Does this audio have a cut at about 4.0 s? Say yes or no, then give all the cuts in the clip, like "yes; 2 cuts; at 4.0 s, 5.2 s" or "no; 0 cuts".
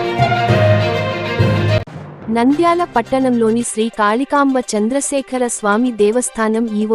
no; 1 cut; at 1.8 s